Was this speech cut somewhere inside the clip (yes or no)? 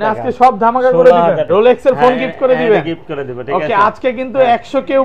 yes